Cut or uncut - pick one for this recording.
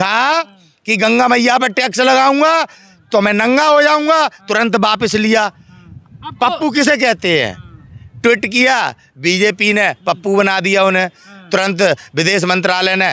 uncut